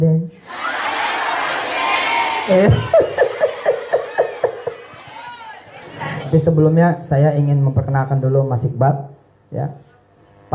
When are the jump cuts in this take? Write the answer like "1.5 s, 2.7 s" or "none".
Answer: 6.3 s